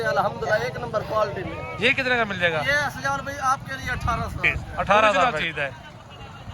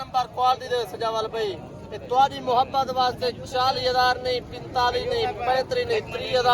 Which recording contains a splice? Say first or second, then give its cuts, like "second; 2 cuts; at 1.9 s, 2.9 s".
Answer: first; 1 cut; at 5.2 s